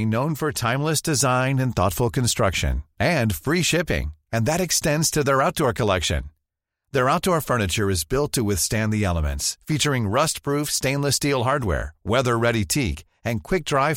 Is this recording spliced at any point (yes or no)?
no